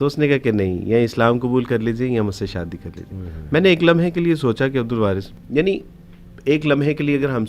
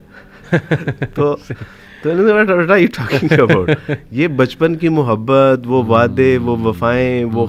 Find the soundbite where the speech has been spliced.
first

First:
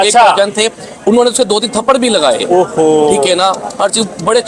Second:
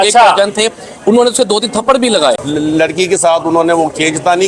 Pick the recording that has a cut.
second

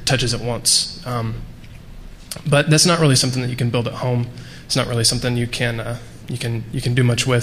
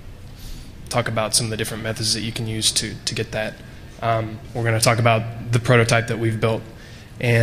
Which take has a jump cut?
second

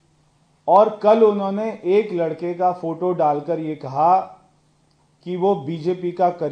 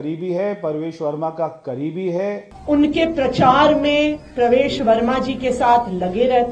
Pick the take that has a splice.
second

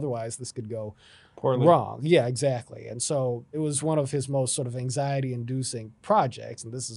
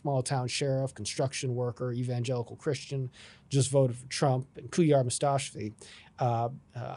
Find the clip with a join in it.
first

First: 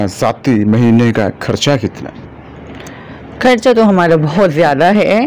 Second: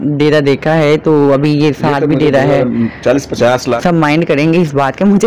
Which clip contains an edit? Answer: second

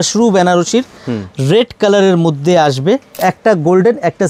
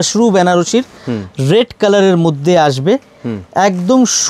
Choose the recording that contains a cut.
first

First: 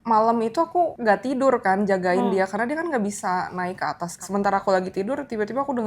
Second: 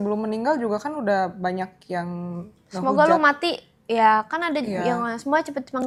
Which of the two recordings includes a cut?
first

